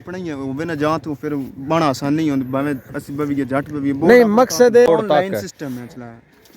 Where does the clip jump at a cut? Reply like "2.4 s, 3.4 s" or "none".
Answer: 4.9 s